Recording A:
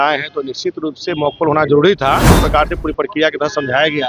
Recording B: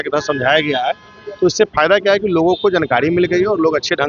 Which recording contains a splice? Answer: A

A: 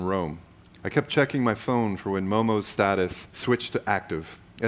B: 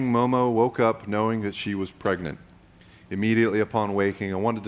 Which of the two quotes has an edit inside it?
A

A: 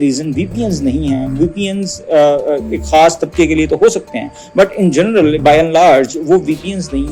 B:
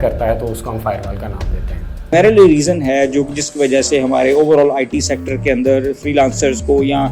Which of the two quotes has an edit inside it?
B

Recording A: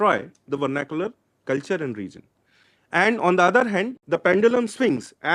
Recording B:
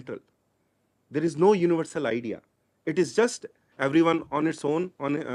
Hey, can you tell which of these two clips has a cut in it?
A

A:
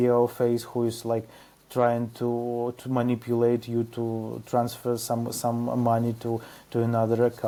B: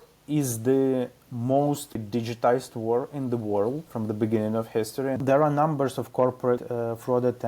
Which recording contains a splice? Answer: B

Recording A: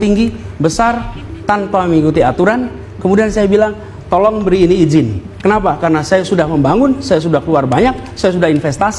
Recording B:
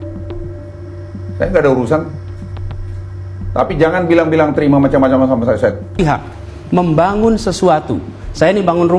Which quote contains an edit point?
B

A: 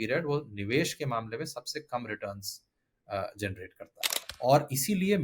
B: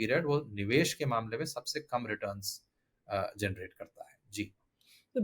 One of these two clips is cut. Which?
A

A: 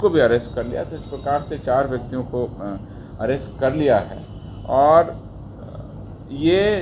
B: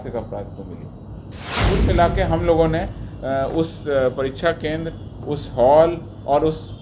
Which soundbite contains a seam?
B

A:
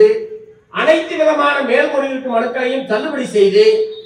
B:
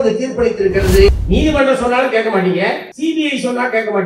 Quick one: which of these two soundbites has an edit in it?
B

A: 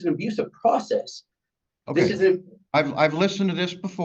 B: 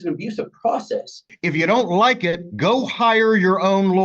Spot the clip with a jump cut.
B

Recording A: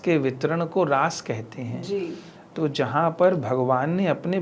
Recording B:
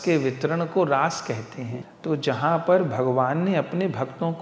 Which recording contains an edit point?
B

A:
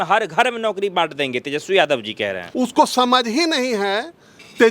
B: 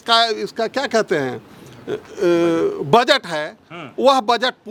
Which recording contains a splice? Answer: A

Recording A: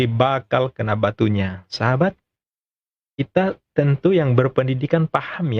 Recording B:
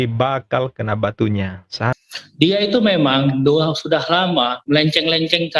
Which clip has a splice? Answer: B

